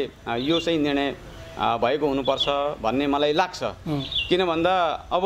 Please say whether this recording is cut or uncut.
uncut